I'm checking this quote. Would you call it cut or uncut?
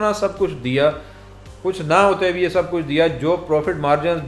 uncut